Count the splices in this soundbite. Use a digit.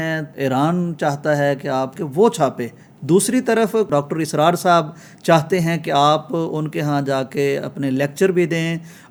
0